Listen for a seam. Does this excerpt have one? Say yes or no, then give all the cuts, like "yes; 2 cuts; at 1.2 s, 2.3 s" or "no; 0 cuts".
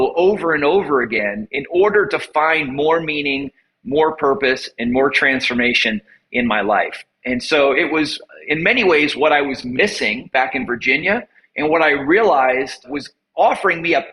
yes; 1 cut; at 12.9 s